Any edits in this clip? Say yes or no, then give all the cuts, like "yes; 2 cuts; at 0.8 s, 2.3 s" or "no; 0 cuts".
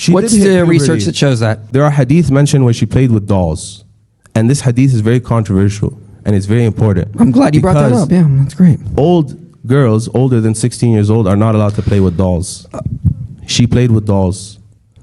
yes; 1 cut; at 1.6 s